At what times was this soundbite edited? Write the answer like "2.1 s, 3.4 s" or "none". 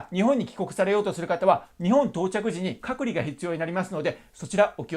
2.8 s